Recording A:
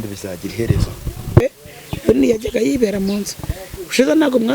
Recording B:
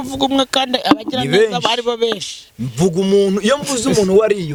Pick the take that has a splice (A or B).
A